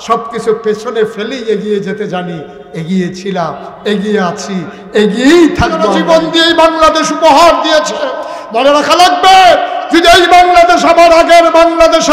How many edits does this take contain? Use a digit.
1